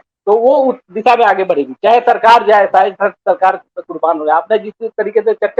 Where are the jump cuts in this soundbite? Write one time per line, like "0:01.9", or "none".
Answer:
none